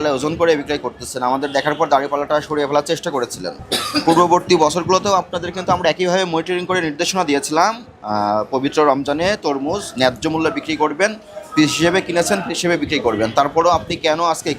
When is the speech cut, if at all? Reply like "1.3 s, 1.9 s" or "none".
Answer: 3.5 s